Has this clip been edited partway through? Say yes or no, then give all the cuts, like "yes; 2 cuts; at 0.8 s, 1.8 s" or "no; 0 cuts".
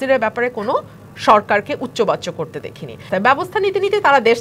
yes; 1 cut; at 3.0 s